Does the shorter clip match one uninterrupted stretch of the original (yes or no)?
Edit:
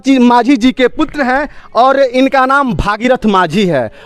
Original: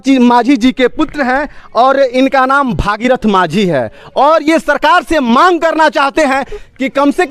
yes